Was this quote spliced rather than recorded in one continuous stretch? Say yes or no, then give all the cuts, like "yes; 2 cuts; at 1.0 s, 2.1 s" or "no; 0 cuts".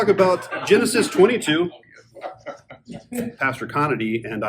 yes; 1 cut; at 3.3 s